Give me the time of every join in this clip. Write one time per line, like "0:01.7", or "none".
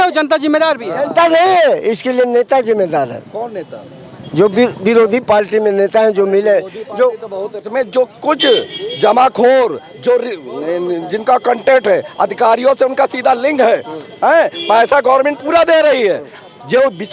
0:07.6